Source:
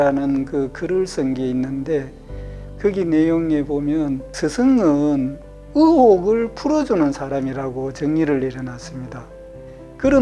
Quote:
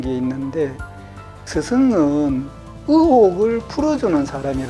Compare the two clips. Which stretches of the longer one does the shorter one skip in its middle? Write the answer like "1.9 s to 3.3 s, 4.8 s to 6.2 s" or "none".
2.7 s to 4.2 s